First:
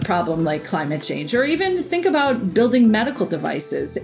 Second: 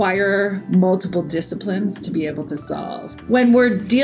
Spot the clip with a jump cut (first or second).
second